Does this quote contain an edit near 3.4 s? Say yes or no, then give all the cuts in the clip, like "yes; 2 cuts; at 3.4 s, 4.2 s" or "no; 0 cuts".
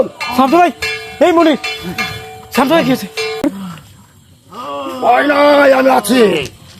yes; 1 cut; at 3.4 s